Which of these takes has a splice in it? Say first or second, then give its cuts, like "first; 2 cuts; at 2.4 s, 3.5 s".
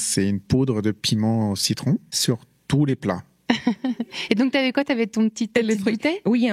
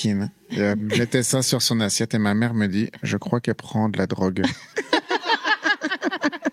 first; 1 cut; at 2.1 s